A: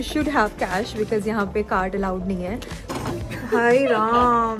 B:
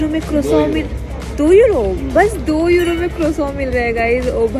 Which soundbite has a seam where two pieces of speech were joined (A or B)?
A